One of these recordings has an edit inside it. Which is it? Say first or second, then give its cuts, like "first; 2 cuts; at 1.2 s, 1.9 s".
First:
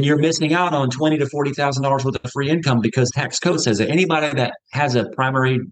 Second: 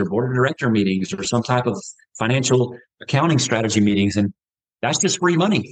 first; 1 cut; at 3.2 s